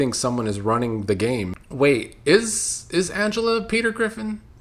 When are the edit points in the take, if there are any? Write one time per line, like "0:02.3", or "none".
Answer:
0:01.6